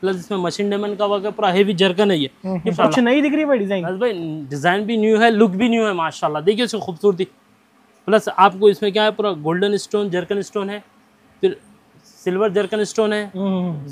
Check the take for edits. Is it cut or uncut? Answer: cut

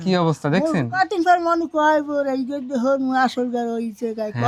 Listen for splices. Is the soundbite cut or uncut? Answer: uncut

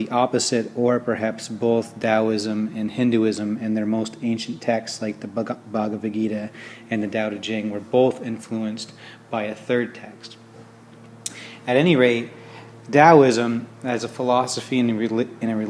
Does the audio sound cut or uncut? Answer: cut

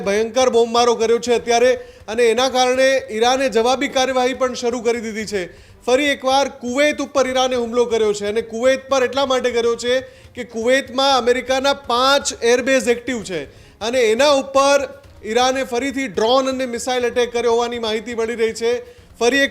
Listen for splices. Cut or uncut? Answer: uncut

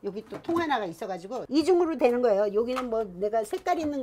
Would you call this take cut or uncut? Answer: cut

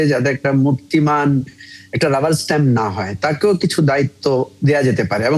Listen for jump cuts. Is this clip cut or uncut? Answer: uncut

